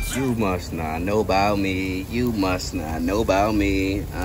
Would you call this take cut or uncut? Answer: uncut